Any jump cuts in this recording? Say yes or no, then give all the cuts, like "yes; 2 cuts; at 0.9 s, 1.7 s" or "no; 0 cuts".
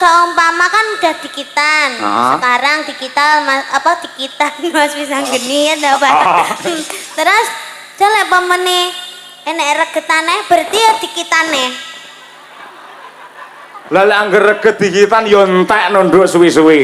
no; 0 cuts